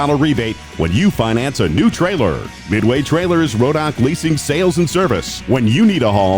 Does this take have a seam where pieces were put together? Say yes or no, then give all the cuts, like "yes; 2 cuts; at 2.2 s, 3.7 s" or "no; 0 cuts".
no; 0 cuts